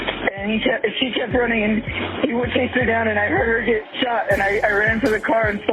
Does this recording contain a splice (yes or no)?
no